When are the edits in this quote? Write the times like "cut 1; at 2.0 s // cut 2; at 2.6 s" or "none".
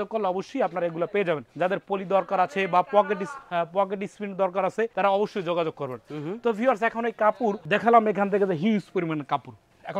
none